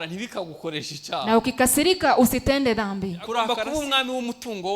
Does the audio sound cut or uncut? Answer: cut